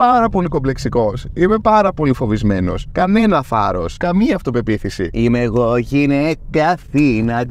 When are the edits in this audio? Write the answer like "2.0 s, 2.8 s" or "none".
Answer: 5.1 s

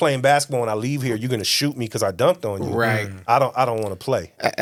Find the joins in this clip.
none

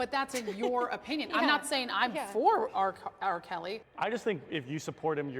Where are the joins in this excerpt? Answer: 3.9 s

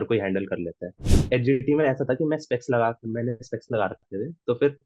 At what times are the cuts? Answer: 1.1 s

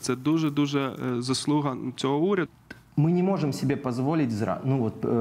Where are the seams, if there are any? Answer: 2.5 s

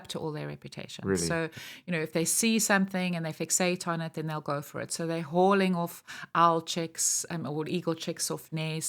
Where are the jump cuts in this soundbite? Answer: none

